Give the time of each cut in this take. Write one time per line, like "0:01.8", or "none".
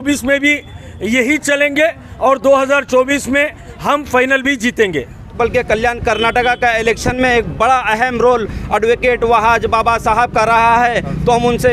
0:05.4